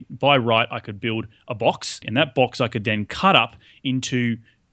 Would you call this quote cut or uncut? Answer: cut